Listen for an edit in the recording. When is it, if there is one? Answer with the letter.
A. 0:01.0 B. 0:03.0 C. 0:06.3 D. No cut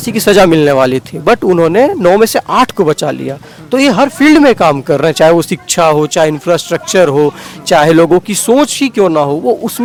D